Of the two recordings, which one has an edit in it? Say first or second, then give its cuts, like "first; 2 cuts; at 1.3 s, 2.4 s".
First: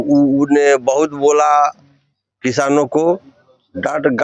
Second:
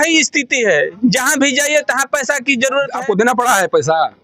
second; 1 cut; at 2.9 s